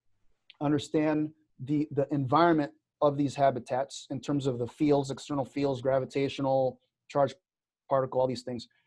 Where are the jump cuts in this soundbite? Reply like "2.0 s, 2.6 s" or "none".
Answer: 2.9 s